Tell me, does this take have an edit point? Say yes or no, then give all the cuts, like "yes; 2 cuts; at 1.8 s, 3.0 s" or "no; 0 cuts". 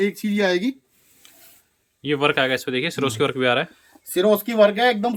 no; 0 cuts